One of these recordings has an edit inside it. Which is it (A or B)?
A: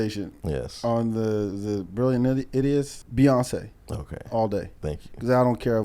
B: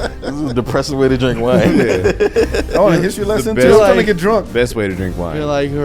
A